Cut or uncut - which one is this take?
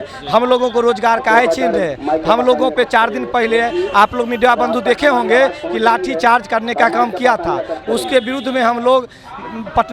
uncut